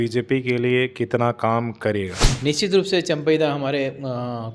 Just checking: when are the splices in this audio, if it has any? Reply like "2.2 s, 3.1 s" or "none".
2.2 s